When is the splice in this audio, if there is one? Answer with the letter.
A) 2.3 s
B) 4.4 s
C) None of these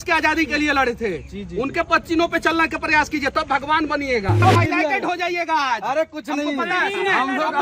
B